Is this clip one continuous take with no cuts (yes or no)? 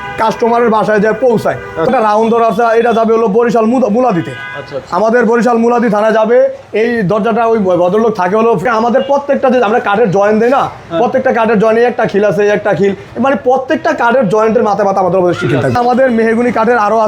no